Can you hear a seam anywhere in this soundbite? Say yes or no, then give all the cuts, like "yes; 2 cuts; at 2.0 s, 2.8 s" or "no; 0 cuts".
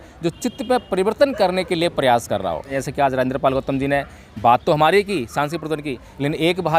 yes; 1 cut; at 2.8 s